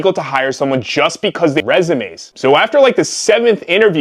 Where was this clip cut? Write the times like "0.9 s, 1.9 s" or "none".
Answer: 1.6 s